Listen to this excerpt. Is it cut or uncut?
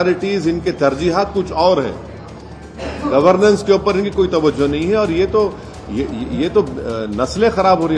uncut